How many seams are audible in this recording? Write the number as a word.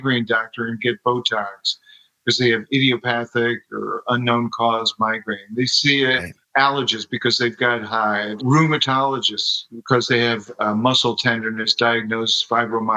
two